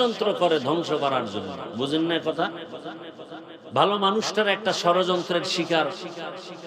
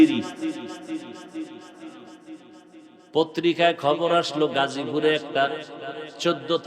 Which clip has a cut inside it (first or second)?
second